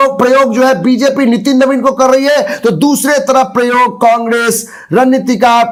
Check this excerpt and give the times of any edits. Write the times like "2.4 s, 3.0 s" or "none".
none